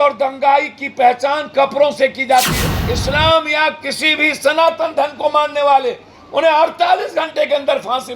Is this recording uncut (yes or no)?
no